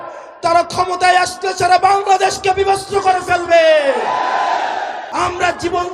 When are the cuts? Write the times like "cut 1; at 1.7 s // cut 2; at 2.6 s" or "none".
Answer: cut 1; at 5.0 s